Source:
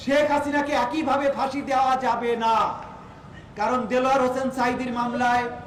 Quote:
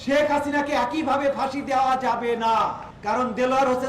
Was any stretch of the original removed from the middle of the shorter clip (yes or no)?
yes